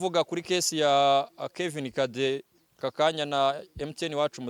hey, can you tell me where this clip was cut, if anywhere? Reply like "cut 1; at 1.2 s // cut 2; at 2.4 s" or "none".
none